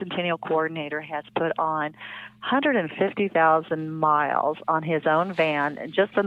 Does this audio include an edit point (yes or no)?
no